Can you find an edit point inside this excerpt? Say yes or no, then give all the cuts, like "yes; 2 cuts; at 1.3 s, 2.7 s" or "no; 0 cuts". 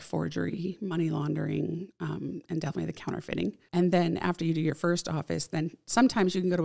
yes; 1 cut; at 3.6 s